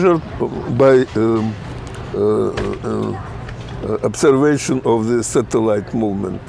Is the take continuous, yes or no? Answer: yes